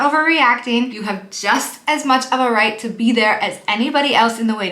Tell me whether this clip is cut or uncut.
cut